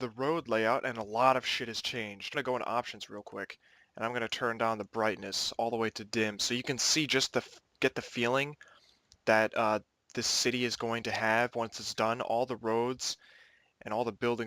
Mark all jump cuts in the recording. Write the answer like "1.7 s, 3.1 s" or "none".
none